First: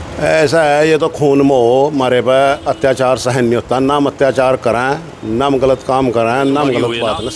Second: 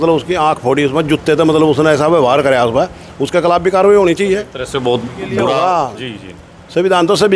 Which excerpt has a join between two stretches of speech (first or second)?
second